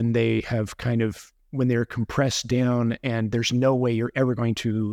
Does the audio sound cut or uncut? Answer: uncut